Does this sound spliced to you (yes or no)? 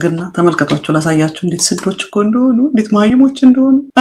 no